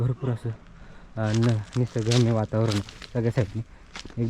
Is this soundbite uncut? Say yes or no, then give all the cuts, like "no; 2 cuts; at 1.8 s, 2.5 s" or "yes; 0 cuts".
yes; 0 cuts